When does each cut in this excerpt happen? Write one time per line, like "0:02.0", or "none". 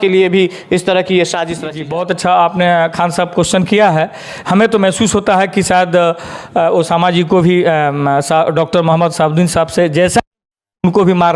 0:01.8